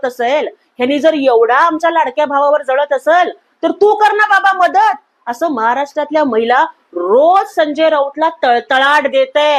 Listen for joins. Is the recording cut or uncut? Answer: uncut